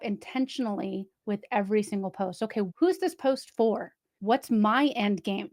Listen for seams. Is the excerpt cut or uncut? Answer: cut